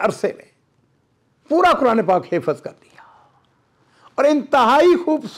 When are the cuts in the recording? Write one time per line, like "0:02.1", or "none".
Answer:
none